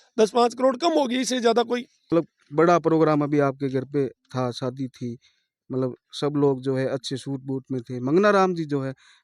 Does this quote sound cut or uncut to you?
cut